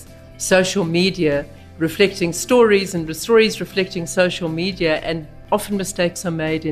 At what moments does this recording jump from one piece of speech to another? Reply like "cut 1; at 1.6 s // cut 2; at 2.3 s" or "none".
cut 1; at 5.3 s